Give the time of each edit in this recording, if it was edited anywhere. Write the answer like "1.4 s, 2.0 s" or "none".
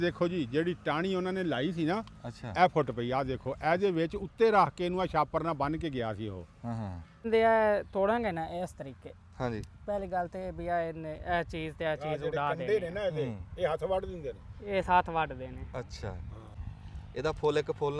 7.3 s, 16.6 s